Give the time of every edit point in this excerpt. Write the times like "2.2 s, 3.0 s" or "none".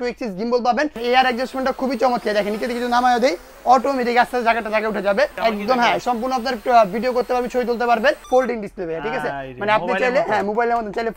1.0 s, 5.4 s, 8.2 s

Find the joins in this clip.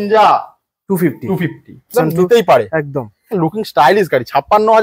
1.9 s

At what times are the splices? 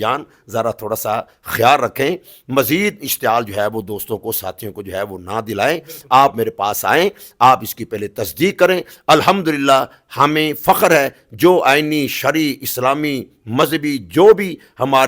none

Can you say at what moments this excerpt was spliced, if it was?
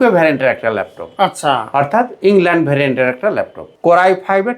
3.6 s

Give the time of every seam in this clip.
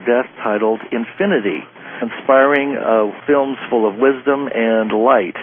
none

